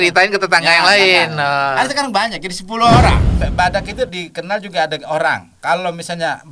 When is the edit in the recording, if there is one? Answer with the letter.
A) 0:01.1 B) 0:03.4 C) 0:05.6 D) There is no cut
B